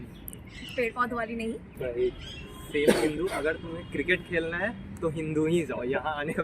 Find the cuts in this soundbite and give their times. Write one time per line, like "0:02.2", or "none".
0:01.7